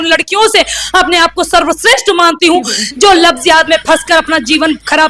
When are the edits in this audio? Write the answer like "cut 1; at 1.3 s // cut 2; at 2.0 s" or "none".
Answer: cut 1; at 2.8 s